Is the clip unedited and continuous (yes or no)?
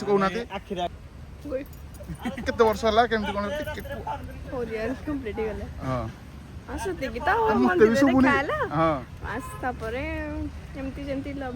no